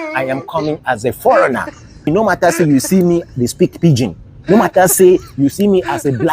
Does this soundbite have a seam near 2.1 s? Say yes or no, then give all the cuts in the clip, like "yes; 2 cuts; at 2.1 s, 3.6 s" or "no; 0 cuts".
yes; 1 cut; at 2.1 s